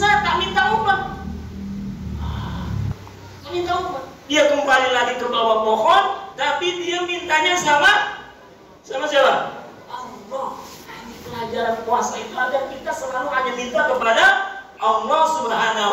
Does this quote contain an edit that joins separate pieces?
no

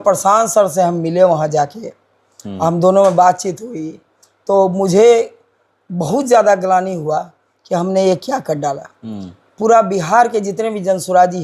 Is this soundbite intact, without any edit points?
yes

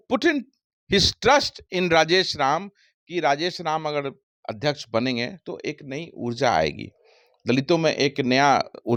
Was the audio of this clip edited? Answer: no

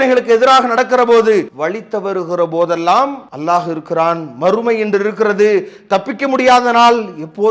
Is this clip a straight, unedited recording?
no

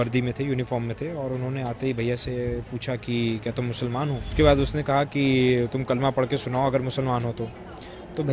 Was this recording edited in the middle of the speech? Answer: yes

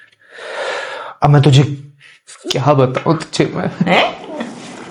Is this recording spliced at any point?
no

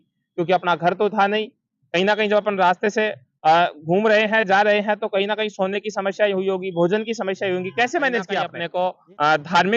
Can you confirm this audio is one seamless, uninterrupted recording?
no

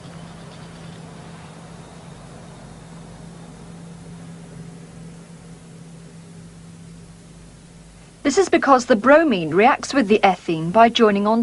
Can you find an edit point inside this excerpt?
yes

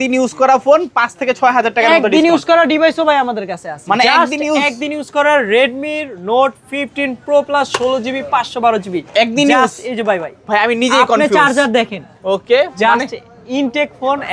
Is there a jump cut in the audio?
no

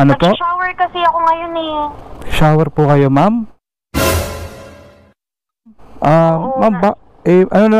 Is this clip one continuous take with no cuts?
yes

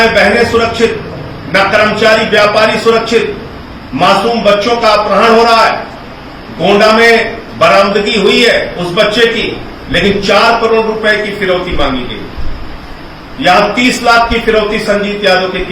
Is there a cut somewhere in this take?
no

